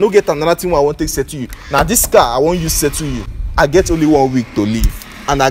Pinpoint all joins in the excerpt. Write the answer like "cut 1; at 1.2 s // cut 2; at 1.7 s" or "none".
cut 1; at 3.4 s